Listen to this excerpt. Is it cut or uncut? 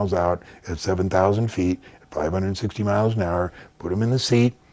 uncut